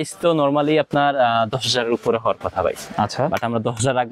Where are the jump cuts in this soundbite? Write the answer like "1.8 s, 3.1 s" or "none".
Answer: none